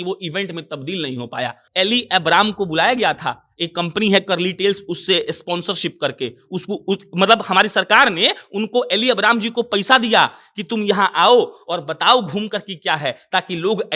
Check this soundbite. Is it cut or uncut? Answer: cut